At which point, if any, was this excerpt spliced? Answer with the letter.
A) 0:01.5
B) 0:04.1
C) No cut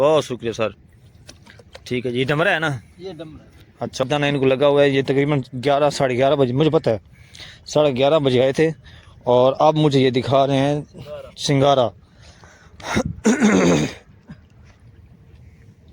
B